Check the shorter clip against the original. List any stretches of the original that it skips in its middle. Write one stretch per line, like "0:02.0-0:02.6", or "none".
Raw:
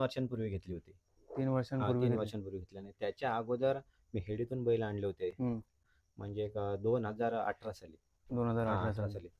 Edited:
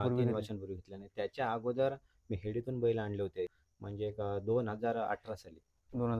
0:05.3-0:05.9